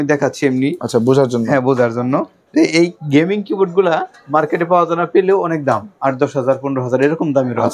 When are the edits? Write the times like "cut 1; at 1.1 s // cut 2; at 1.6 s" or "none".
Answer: none